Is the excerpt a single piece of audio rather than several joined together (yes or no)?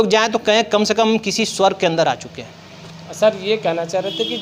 yes